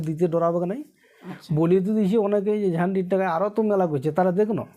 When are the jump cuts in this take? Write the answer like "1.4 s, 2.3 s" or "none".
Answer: none

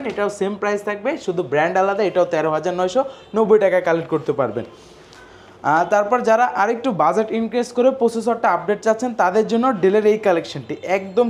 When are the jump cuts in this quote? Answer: none

